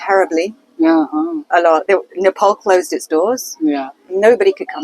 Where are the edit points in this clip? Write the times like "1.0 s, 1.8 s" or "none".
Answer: 1.8 s